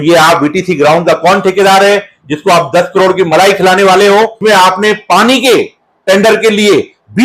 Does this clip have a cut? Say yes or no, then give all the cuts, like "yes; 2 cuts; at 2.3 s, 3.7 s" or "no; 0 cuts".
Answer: yes; 1 cut; at 4.4 s